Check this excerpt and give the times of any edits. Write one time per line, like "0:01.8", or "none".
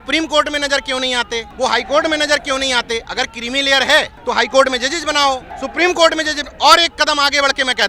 0:01.5
0:04.1
0:05.6